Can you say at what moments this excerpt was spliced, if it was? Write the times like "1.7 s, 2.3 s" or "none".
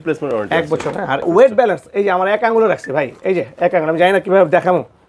1.2 s